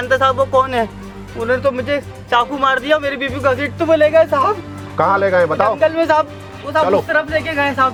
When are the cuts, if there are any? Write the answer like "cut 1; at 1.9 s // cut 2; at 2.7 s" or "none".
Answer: none